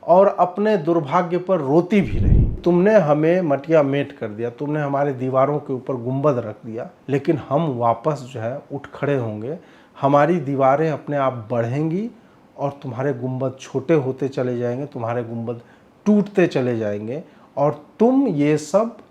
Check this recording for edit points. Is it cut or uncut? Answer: cut